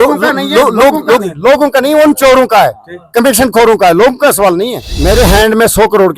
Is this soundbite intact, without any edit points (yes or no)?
no